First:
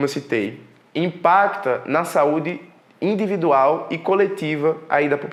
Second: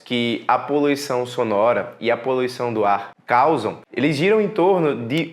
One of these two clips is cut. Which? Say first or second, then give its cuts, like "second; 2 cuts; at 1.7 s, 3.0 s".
second; 2 cuts; at 3.1 s, 3.8 s